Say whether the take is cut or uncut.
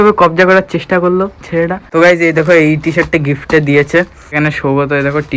cut